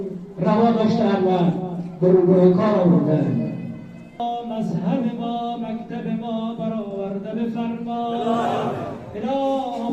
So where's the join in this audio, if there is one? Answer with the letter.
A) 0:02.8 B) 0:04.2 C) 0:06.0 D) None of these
B